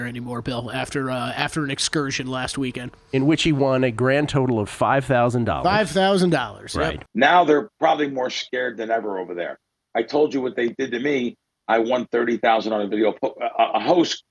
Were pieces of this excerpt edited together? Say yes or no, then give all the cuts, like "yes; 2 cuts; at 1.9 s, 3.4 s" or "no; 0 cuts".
yes; 1 cut; at 7.0 s